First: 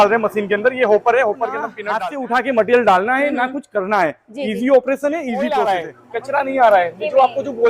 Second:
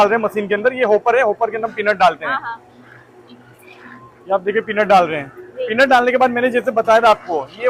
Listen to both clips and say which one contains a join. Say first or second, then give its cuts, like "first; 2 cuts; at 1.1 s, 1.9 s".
first; 2 cuts; at 1.8 s, 5.3 s